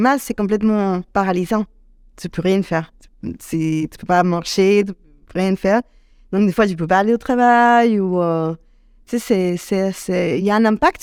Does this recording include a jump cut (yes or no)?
no